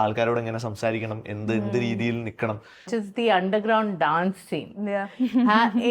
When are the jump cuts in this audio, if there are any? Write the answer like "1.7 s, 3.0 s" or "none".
2.8 s